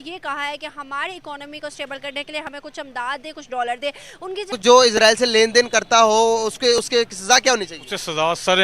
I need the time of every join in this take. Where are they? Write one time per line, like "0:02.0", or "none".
0:04.4